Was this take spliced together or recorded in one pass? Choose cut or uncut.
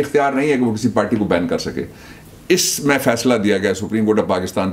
uncut